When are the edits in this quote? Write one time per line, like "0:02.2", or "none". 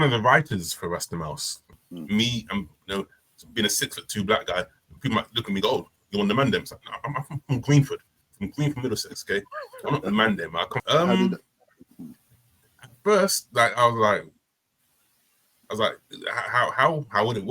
0:01.7
0:10.8